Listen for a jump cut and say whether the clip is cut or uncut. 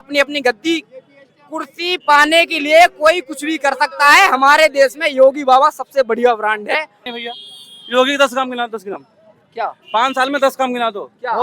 cut